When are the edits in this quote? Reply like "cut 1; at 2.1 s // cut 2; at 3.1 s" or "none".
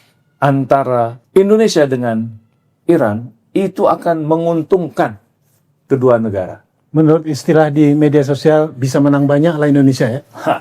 cut 1; at 1.2 s